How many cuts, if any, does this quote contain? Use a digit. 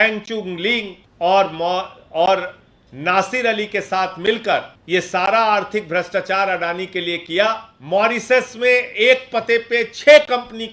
3